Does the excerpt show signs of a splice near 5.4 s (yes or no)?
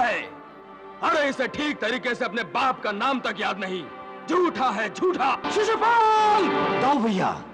yes